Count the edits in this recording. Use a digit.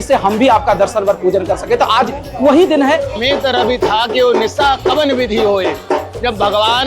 1